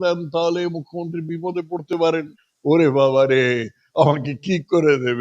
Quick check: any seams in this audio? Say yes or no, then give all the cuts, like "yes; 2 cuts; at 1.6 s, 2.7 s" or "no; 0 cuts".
yes; 1 cut; at 2.2 s